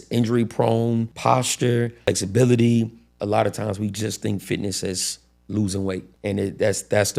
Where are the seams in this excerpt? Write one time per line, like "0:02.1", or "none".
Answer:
0:01.1
0:02.1
0:03.1
0:06.1